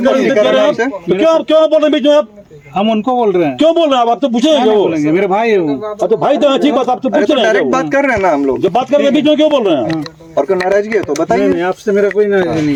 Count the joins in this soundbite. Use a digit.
0